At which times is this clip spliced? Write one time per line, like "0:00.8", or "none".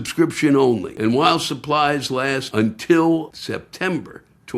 0:00.9
0:02.4
0:03.4